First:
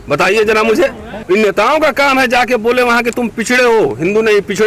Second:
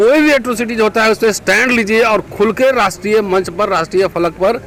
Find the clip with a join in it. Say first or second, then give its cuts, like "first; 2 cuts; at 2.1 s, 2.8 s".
first; 1 cut; at 1.1 s